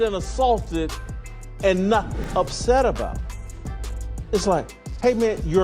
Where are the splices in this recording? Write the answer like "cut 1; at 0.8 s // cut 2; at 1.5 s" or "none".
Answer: cut 1; at 2.3 s

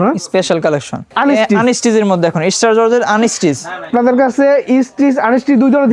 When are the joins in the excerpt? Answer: cut 1; at 1.1 s // cut 2; at 3.8 s

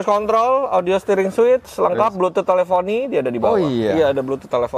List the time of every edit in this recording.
none

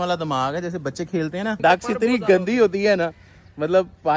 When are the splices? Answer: cut 1; at 1.6 s

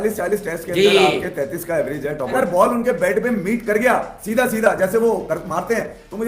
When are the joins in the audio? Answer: cut 1; at 2.3 s

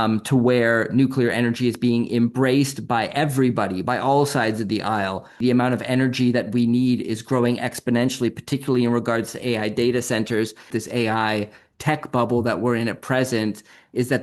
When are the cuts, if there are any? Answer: cut 1; at 5.4 s // cut 2; at 10.7 s

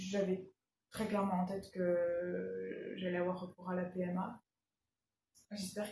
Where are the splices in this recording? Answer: cut 1; at 4.5 s

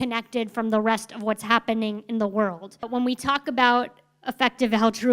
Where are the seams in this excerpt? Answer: cut 1; at 2.9 s

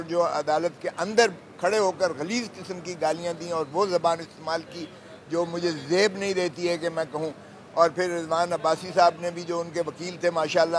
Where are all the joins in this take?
none

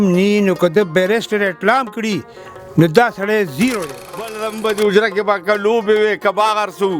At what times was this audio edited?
cut 1; at 4.5 s

